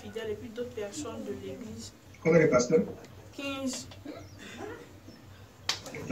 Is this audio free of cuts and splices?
yes; 0 cuts

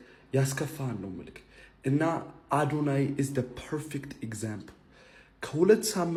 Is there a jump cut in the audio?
no; 0 cuts

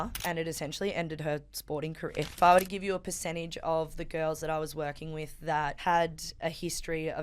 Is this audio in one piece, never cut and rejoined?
no; 2 cuts; at 2.4 s, 5.8 s

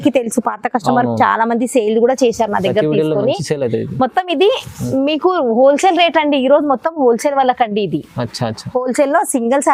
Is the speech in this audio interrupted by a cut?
no; 0 cuts

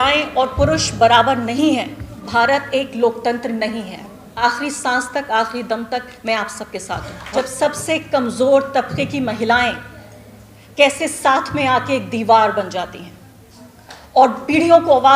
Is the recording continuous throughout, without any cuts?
no; 3 cuts; at 2.2 s, 4.4 s, 7.2 s

